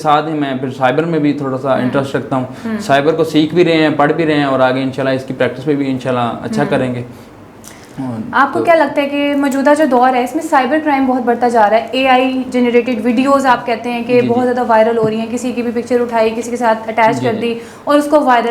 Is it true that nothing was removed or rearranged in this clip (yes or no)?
yes